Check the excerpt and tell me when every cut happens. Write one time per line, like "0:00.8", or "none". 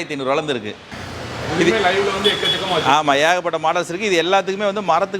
0:00.9